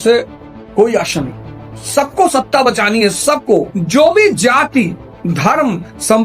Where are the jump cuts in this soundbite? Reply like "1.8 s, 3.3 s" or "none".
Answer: 3.8 s